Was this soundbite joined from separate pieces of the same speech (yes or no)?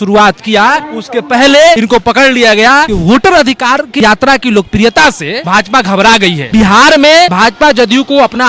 yes